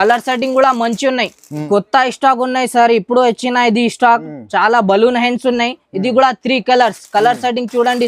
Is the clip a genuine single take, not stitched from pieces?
no; 1 cut; at 1.7 s

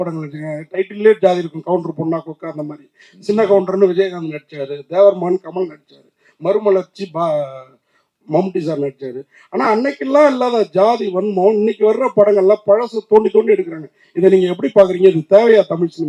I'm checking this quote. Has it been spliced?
no; 0 cuts

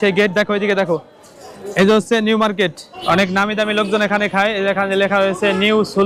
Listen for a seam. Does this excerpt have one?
yes; 1 cut; at 2.9 s

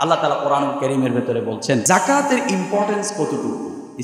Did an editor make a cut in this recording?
yes; 1 cut; at 1.8 s

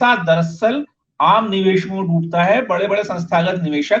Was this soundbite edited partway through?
no; 0 cuts

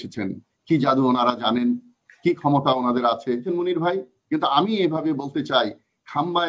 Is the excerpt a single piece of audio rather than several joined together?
no; 1 cut; at 3.5 s

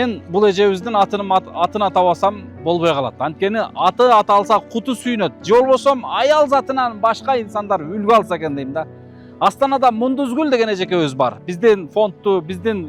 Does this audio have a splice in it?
no; 0 cuts

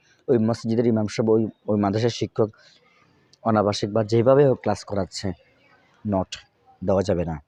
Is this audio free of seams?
yes; 0 cuts

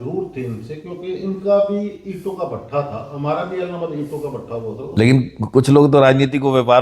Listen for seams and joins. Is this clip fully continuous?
no; 1 cut; at 4.8 s

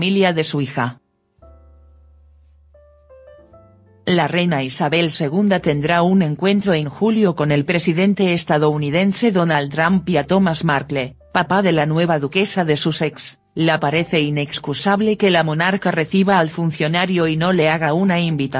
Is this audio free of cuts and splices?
no; 1 cut; at 12.1 s

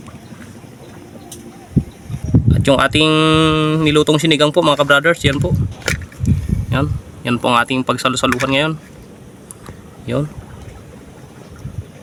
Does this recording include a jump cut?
no; 0 cuts

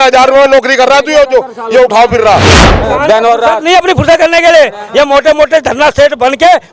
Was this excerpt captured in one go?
no; 1 cut; at 2.7 s

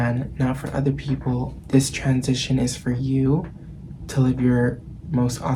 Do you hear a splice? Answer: no; 0 cuts

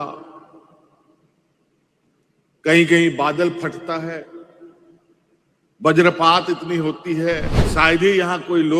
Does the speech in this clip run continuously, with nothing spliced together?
no; 1 cut; at 7.6 s

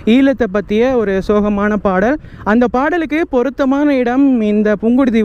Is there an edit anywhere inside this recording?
no; 0 cuts

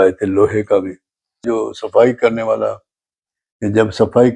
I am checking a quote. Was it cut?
yes; 1 cut; at 1.4 s

